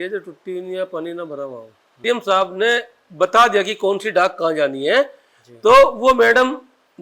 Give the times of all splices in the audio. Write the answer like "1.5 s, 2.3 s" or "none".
2.0 s